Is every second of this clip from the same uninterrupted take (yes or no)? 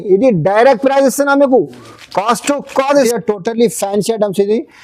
no